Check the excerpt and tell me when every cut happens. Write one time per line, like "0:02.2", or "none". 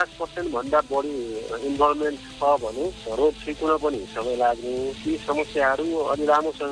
0:05.0